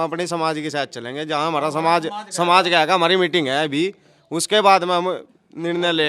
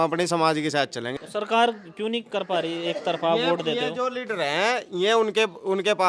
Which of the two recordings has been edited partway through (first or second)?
second